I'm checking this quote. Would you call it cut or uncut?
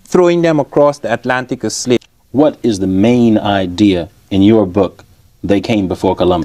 cut